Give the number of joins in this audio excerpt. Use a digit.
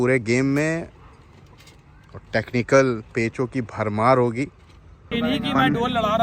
1